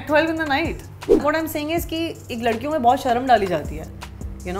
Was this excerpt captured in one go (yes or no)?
no